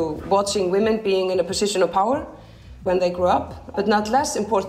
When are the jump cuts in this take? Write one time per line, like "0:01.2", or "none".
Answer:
0:03.7